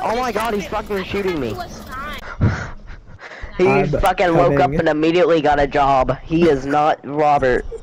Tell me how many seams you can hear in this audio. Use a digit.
0